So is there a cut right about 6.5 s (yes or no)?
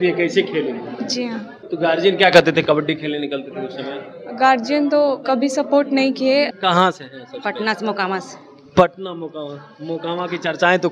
yes